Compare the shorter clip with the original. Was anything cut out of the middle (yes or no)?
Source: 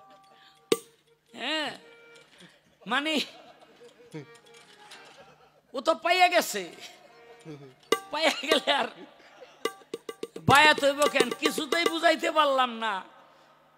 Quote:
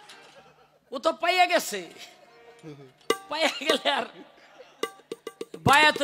no